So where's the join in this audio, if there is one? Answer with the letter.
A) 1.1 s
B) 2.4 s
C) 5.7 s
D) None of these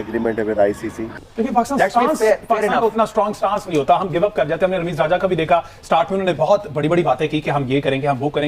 A